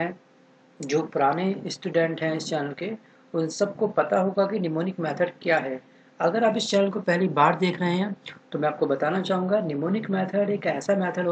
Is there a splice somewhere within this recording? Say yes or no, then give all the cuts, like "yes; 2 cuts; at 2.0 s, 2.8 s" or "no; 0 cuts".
yes; 1 cut; at 3.5 s